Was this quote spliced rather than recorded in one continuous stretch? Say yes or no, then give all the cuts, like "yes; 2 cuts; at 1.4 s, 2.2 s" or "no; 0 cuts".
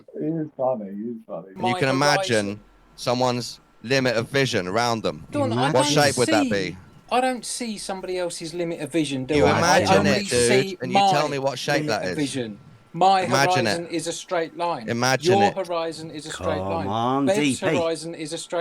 yes; 1 cut; at 1.5 s